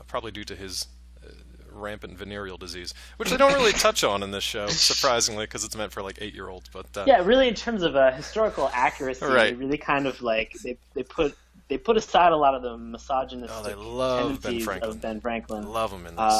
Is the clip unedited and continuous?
yes; 0 cuts

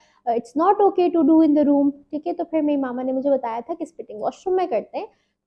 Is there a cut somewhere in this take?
no; 0 cuts

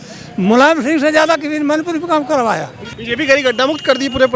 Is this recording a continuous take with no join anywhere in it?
no; 1 cut; at 2.8 s

